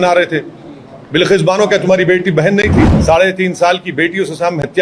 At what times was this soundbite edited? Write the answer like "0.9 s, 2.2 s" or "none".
2.9 s